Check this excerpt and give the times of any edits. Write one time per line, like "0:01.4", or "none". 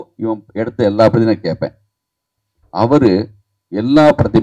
0:02.4